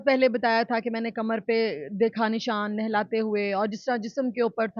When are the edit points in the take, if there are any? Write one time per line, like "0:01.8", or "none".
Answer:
none